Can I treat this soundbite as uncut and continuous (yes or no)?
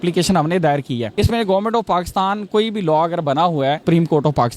no